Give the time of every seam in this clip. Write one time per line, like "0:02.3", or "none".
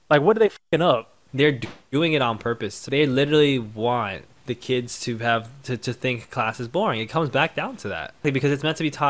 0:01.2
0:02.8
0:04.3
0:08.2